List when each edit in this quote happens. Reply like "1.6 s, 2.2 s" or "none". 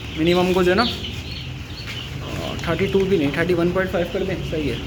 none